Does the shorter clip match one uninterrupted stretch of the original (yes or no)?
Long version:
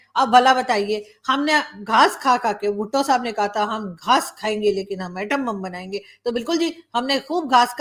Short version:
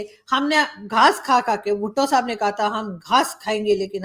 yes